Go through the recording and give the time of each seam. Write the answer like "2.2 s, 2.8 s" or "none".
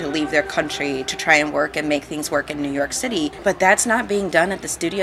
3.4 s